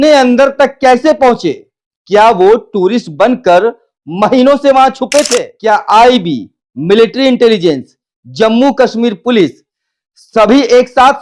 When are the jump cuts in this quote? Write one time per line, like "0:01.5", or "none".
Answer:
0:05.5